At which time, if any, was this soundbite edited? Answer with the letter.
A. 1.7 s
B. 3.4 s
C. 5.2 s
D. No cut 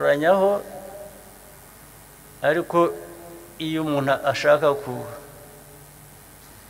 A